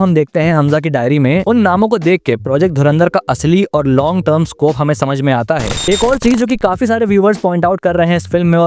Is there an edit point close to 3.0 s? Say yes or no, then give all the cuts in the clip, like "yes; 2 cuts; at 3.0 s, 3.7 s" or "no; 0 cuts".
no; 2 cuts; at 1.4 s, 5.7 s